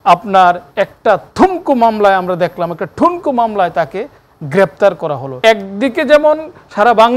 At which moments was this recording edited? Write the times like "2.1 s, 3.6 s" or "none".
5.4 s